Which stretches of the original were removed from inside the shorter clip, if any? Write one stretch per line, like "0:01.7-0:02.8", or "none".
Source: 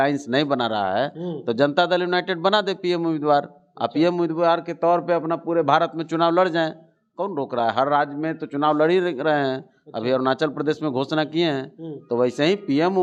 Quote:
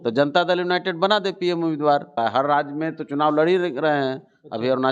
0:03.5-0:07.5